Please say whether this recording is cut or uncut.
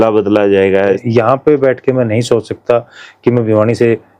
cut